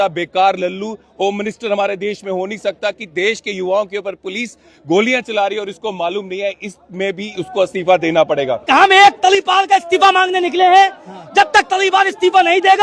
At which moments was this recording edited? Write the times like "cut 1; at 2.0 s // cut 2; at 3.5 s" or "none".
cut 1; at 8.7 s